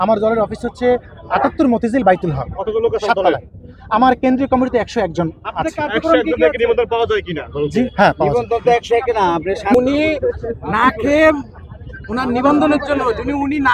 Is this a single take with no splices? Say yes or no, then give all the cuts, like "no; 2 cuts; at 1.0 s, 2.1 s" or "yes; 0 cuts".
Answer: no; 1 cut; at 9.7 s